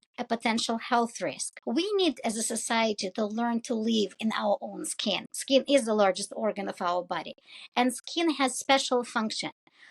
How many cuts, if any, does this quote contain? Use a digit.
2